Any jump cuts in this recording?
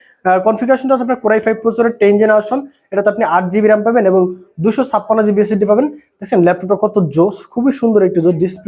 no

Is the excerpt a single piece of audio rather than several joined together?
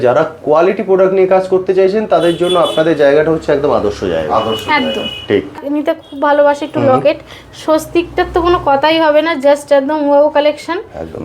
no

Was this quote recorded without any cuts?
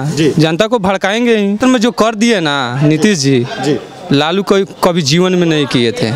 no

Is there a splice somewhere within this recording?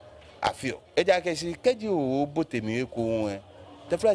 no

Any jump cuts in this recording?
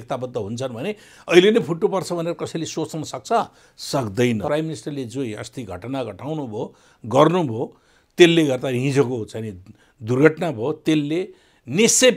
yes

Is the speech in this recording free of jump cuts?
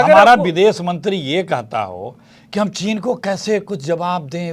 yes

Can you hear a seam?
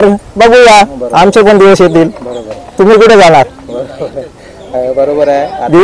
no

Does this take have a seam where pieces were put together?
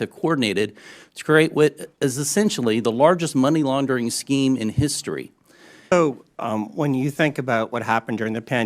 yes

